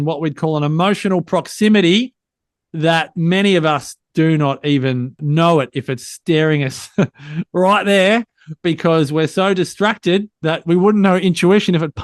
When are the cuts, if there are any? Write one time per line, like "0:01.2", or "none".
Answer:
0:05.2